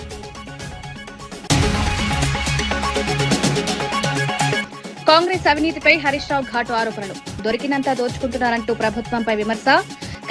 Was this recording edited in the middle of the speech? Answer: no; 0 cuts

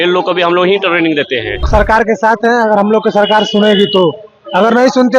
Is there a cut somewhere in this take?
yes; 1 cut; at 1.7 s

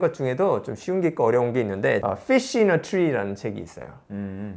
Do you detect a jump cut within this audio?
yes; 1 cut; at 2.0 s

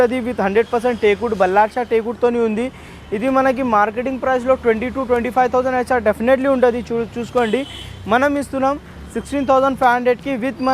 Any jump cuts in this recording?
no; 0 cuts

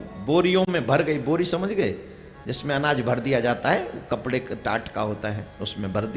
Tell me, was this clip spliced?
no; 0 cuts

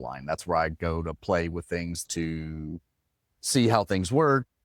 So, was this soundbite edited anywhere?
yes; 1 cut; at 1.9 s

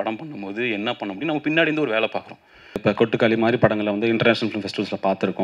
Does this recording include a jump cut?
yes; 1 cut; at 2.8 s

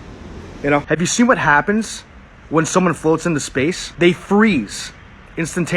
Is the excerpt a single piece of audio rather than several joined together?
no; 2 cuts; at 0.8 s, 3.8 s

